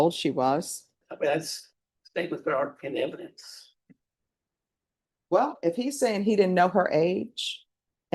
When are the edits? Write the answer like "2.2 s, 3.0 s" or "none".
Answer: 1.0 s